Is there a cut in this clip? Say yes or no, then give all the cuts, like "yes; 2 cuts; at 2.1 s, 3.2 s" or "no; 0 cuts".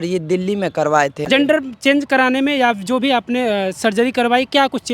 yes; 1 cut; at 1.2 s